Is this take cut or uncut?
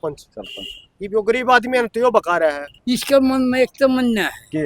cut